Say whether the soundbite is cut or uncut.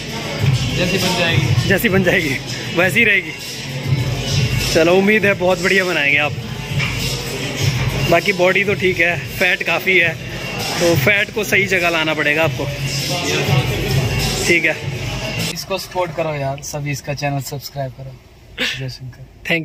cut